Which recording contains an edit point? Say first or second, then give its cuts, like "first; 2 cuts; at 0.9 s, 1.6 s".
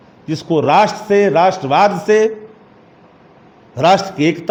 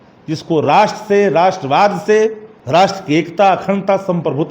second; 1 cut; at 2.5 s